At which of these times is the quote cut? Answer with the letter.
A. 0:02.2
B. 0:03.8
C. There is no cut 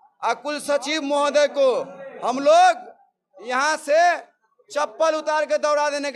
C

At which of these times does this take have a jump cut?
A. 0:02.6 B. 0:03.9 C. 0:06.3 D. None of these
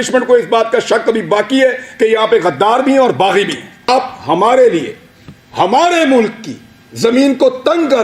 B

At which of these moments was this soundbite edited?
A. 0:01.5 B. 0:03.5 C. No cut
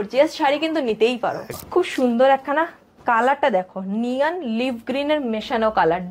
A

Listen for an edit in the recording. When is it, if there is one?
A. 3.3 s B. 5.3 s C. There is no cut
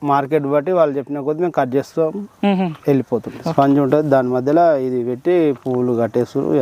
A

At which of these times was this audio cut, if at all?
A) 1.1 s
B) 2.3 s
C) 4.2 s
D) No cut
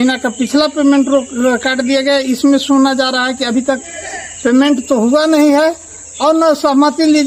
D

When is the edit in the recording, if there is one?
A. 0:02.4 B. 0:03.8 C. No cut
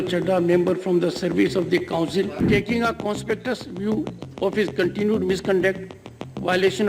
A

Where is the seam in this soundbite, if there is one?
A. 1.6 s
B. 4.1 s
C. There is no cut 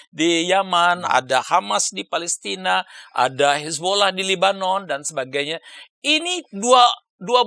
C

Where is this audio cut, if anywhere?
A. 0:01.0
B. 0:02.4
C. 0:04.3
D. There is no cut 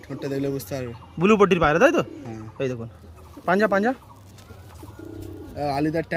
D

